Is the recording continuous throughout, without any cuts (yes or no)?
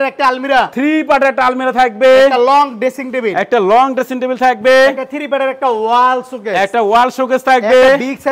yes